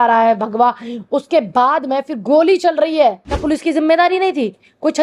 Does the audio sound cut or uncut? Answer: cut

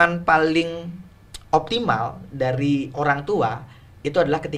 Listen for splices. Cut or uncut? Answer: uncut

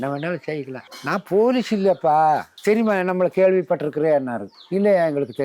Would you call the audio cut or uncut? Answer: uncut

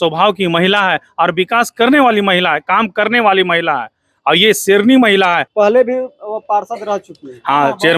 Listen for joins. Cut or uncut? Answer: cut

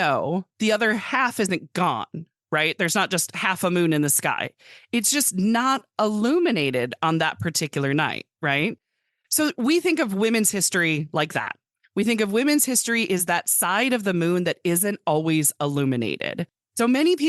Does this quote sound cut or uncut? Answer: cut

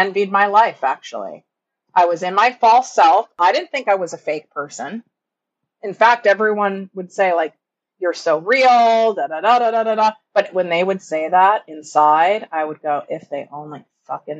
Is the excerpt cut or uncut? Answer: cut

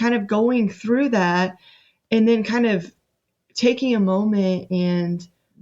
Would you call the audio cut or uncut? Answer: uncut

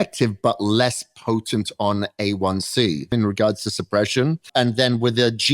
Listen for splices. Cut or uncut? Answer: cut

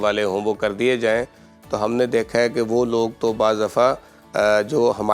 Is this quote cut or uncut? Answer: uncut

